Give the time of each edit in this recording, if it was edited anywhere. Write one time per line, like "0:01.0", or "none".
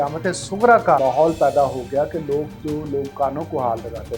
0:01.0